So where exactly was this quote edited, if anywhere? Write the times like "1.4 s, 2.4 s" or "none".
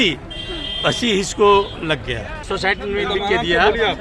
2.5 s